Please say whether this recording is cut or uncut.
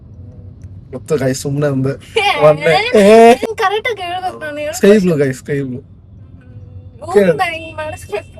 cut